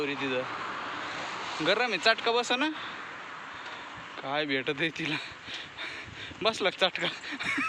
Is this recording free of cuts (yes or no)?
yes